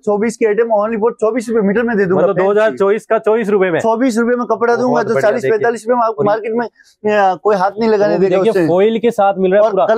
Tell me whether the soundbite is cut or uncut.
uncut